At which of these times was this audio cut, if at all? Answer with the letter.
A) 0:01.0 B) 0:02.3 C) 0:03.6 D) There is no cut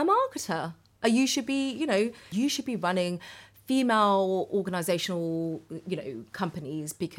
B